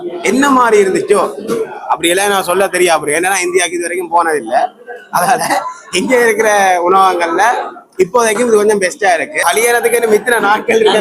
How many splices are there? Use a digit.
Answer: 1